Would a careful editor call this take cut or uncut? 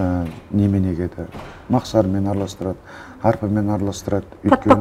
uncut